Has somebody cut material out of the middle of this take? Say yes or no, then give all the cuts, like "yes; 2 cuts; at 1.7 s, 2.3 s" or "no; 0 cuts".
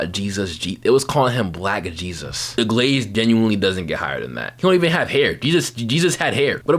yes; 1 cut; at 4.4 s